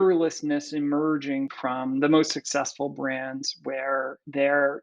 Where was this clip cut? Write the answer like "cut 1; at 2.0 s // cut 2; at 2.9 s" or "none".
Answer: cut 1; at 1.5 s